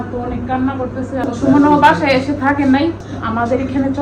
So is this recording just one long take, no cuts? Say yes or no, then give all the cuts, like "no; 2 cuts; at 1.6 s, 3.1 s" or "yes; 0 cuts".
no; 2 cuts; at 1.2 s, 3.1 s